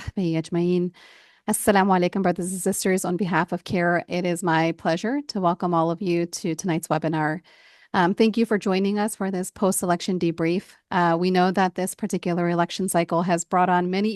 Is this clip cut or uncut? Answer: uncut